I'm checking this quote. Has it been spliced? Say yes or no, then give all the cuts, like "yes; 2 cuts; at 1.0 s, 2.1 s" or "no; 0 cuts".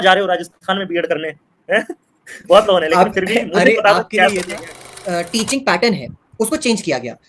yes; 1 cut; at 5.0 s